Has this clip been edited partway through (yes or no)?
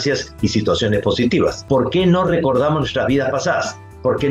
yes